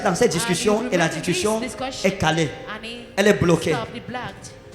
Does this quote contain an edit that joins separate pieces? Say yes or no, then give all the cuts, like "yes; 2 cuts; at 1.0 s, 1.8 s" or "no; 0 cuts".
no; 0 cuts